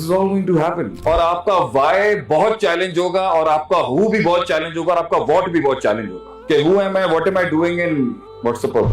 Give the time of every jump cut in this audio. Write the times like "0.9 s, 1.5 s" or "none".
0.9 s